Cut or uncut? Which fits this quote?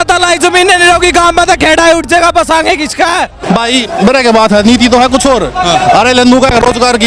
cut